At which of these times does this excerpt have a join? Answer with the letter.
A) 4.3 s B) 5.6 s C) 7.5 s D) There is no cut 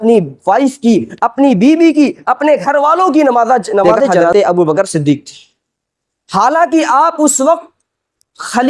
A